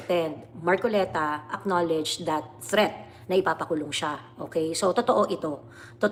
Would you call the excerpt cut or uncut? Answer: uncut